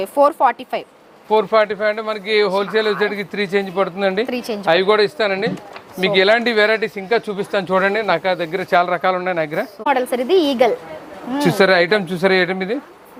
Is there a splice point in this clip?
no; 0 cuts

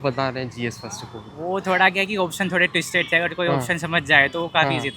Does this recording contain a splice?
no; 0 cuts

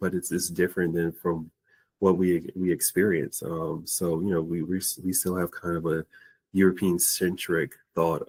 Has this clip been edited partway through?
no; 0 cuts

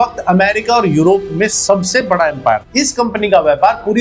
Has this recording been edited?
yes; 1 cut; at 2.7 s

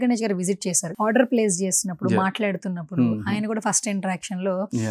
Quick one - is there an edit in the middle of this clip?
yes; 1 cut; at 0.9 s

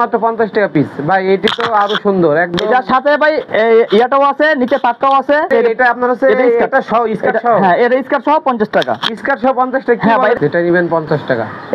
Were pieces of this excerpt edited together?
yes; 2 cuts; at 5.5 s, 10.4 s

